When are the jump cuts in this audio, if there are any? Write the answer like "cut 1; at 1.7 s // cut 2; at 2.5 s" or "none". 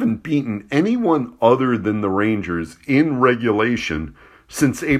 none